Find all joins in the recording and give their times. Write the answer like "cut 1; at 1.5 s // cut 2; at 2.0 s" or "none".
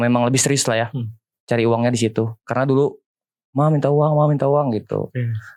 none

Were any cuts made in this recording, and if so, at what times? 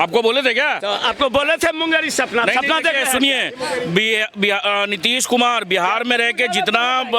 none

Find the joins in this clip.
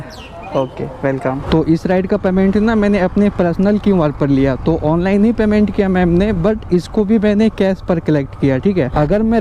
none

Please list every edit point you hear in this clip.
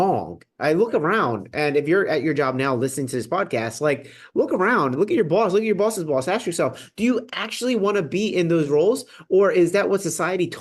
none

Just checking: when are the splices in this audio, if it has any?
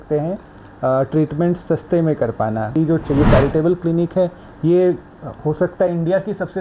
cut 1; at 2.7 s

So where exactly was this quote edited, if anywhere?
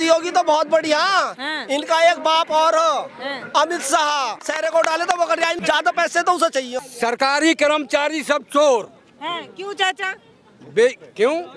cut 1; at 4.4 s // cut 2; at 5.6 s // cut 3; at 6.8 s

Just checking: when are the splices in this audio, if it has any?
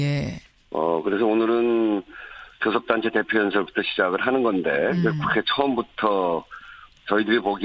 cut 1; at 3.3 s

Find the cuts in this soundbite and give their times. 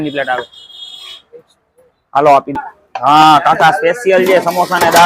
cut 1; at 2.5 s

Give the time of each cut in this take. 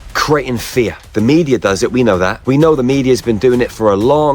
cut 1; at 1.0 s // cut 2; at 2.3 s

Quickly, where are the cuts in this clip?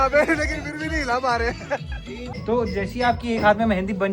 cut 1; at 2.3 s

